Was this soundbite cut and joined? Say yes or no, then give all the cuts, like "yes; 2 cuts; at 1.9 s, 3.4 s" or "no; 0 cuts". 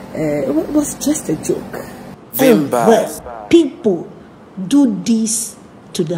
yes; 1 cut; at 2.1 s